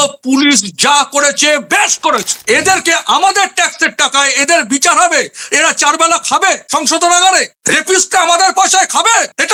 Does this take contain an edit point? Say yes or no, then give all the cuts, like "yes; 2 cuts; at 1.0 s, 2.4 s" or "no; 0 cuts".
no; 0 cuts